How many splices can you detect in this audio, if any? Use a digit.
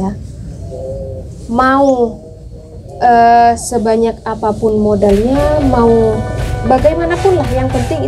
0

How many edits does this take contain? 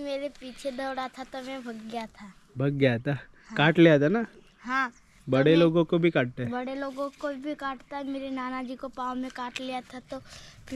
0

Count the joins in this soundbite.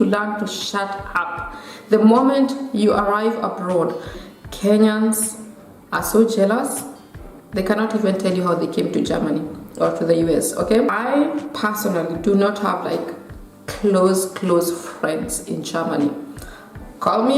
2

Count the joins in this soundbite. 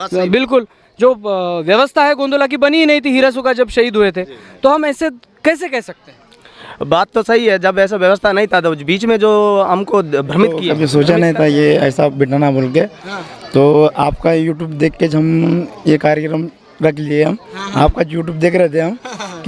1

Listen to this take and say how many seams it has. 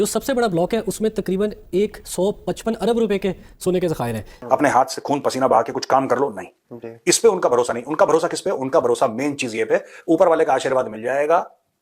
1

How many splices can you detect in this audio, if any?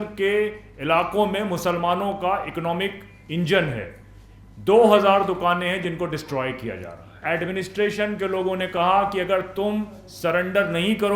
1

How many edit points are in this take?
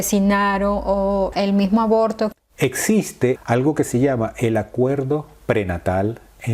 3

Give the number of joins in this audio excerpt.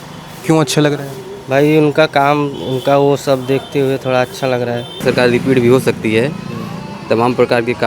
1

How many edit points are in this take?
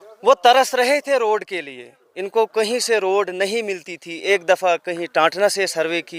0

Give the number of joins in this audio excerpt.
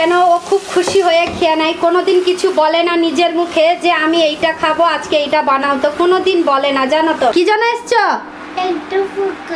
1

